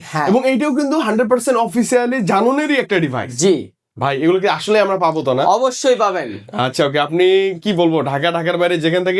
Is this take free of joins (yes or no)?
yes